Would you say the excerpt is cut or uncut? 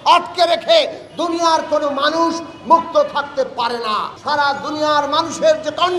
cut